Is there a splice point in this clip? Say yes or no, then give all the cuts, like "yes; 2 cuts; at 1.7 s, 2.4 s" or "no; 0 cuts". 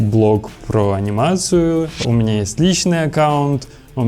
yes; 1 cut; at 2.0 s